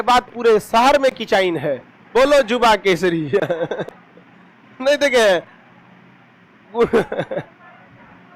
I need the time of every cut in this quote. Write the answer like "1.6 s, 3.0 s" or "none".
none